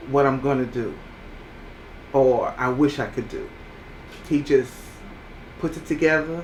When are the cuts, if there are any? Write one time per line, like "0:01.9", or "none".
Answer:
none